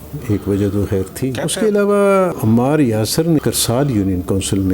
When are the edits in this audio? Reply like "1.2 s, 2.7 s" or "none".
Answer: 1.4 s, 2.3 s, 3.4 s